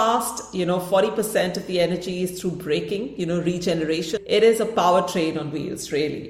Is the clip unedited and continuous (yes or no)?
no